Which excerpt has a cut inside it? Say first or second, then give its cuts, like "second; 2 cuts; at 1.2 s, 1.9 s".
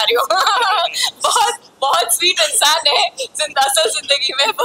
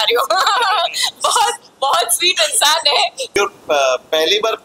second; 1 cut; at 3.3 s